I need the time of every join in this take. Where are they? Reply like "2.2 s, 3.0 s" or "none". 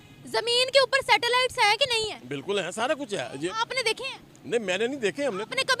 none